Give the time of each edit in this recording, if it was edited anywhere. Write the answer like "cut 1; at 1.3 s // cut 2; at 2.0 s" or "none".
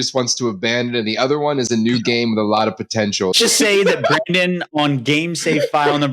cut 1; at 3.4 s